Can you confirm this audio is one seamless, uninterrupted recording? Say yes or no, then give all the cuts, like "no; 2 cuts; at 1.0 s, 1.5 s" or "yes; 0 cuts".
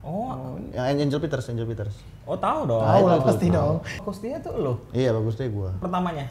no; 1 cut; at 4.1 s